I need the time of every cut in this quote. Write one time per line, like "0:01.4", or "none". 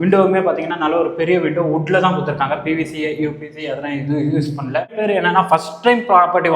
0:04.9